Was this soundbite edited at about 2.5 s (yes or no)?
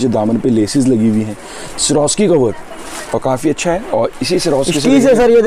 no